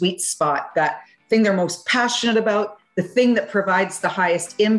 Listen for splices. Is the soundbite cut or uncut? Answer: uncut